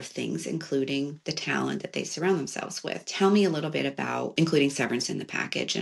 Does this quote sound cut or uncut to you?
cut